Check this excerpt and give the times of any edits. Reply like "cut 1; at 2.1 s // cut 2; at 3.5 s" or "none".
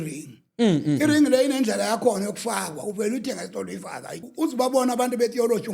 cut 1; at 4.2 s